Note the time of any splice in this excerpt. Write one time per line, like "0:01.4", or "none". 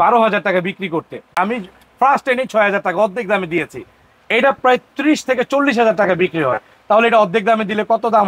0:01.3

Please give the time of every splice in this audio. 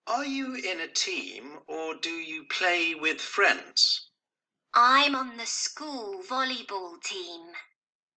0:06.9

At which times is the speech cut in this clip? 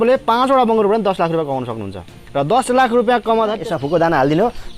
0:03.6

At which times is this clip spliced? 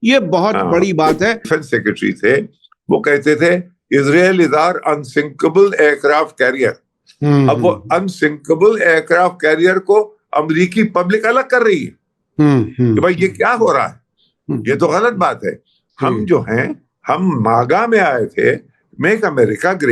0:01.5

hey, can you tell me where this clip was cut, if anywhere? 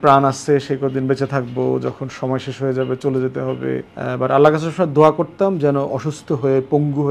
0:03.9

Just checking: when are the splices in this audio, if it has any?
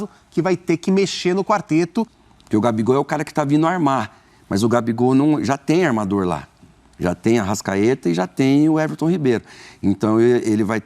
0:02.2

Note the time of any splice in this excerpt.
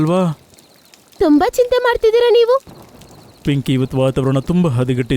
0:02.7

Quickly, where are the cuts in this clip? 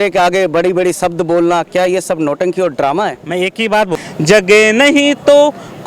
0:04.0

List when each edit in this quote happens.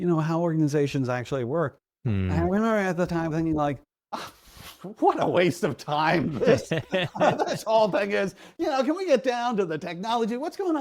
none

